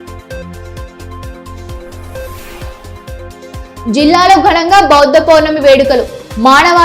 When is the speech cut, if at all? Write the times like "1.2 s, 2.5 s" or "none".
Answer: 0.9 s

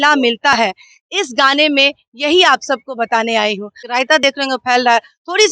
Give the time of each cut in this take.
3.8 s

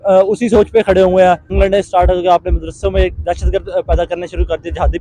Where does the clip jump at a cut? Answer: 1.5 s

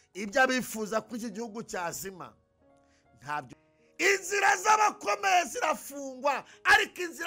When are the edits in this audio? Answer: 3.5 s

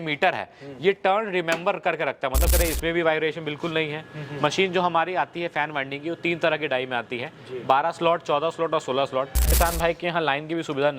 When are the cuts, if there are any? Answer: 2.5 s, 9.6 s

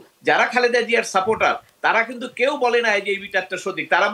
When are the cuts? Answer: none

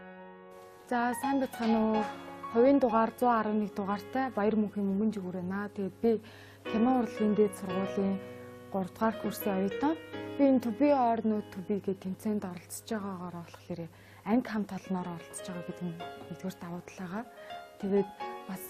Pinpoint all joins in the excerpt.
none

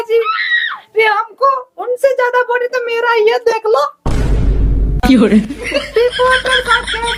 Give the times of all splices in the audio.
none

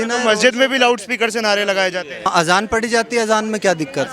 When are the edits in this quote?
2.3 s

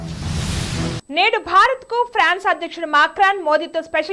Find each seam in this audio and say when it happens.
0.9 s

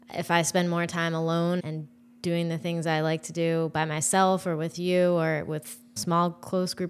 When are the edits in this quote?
1.6 s, 6.0 s

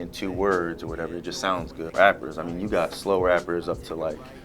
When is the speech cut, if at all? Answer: 1.9 s

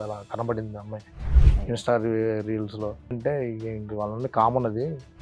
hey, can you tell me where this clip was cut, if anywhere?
3.2 s

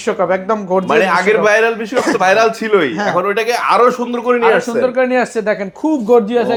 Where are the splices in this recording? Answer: none

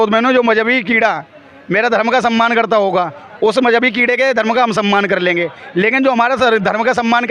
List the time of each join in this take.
none

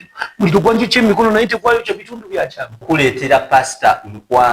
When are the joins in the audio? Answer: 2.8 s

